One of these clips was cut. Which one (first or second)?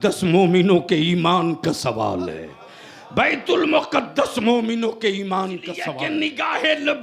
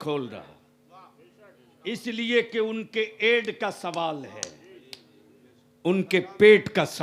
first